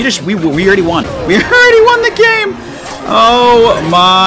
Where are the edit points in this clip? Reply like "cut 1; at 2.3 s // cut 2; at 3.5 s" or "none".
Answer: cut 1; at 1.1 s